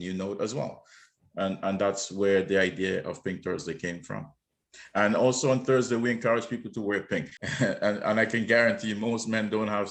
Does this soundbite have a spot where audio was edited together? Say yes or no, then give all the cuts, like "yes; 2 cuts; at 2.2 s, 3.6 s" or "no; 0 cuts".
yes; 1 cut; at 7.4 s